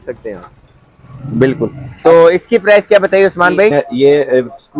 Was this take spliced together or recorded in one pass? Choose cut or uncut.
cut